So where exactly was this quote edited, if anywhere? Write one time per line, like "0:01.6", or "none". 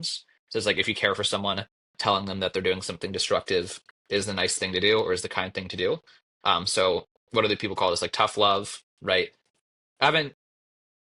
0:09.4